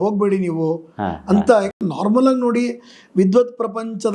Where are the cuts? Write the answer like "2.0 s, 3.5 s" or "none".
none